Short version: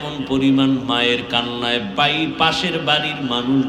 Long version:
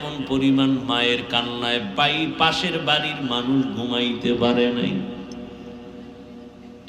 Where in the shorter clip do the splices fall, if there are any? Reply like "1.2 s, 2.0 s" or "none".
none